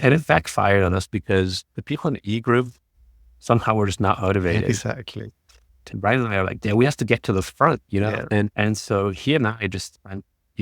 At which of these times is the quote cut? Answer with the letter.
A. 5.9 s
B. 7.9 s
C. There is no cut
A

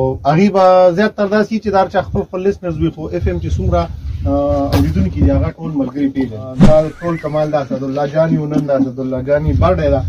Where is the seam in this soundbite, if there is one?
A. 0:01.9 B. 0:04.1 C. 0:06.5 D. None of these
C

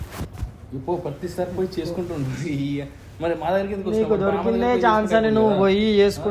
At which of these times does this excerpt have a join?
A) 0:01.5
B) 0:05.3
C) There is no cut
C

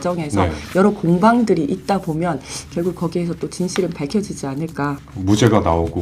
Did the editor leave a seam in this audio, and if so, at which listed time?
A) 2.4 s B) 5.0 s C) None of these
B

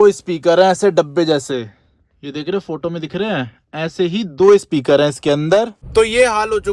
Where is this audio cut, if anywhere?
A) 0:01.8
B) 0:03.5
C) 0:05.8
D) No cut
C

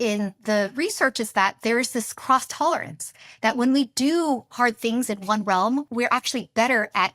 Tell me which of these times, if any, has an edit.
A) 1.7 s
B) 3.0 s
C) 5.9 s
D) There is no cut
C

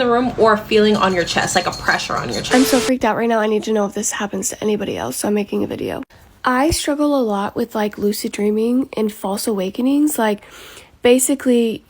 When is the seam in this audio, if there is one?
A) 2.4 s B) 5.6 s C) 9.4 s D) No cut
A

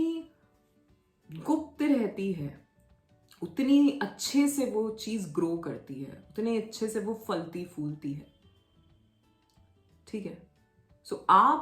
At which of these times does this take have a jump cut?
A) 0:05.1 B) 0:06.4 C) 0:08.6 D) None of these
D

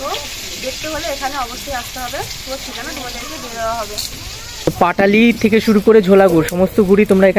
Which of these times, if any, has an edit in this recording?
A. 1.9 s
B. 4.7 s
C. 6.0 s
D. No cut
B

